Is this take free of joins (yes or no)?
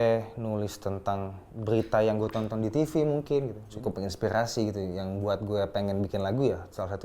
no